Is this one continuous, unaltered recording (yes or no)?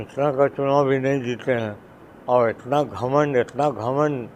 yes